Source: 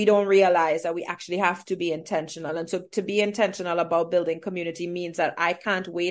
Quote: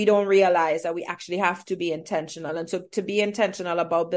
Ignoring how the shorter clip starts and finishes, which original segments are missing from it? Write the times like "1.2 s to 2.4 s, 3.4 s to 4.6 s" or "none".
none